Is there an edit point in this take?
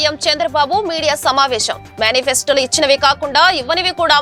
no; 0 cuts

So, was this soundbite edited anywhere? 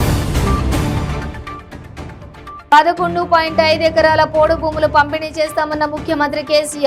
yes; 2 cuts; at 1.1 s, 2.0 s

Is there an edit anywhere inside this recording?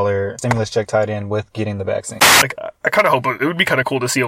yes; 1 cut; at 2.3 s

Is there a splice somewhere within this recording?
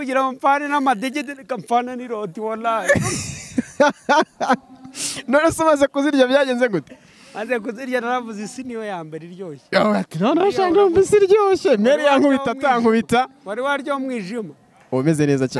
no; 0 cuts

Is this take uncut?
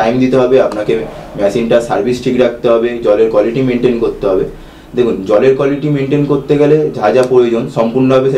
yes; 0 cuts

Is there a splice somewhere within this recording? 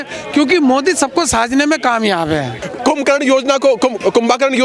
yes; 1 cut; at 2.7 s

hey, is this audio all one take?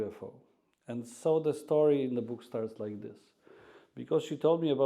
yes; 0 cuts

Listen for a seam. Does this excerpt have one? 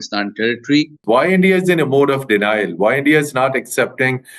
yes; 1 cut; at 1.0 s

